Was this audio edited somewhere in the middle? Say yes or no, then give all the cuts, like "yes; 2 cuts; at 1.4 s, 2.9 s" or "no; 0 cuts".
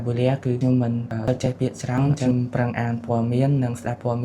yes; 1 cut; at 2.3 s